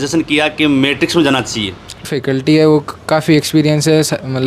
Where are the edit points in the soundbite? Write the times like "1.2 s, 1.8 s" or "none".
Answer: 2.1 s